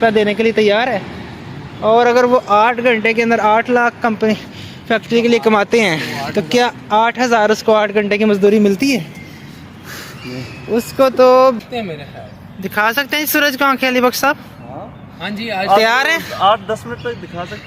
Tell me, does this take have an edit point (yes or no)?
yes